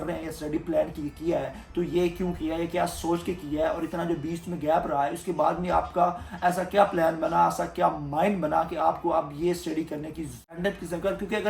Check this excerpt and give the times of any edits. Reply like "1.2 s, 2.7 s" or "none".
10.6 s

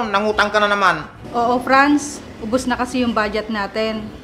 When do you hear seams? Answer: 1.1 s

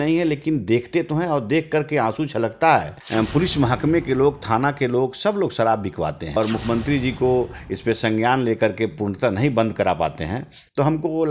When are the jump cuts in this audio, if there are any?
3.0 s, 6.4 s

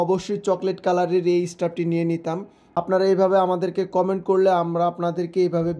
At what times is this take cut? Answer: 2.6 s

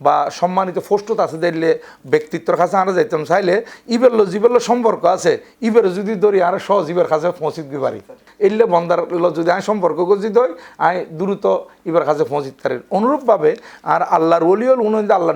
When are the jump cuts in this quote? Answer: 8.3 s

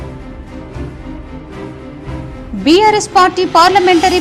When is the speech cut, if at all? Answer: none

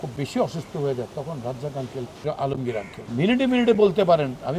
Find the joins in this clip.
2.2 s, 3.0 s

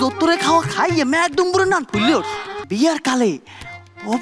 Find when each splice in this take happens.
2.5 s

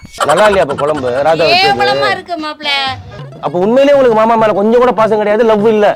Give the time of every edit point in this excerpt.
3.2 s

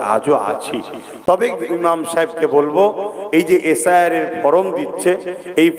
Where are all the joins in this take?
none

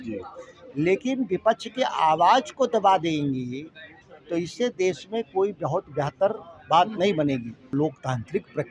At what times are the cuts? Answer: 7.6 s

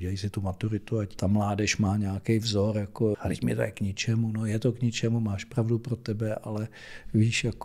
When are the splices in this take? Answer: 1.2 s, 3.2 s

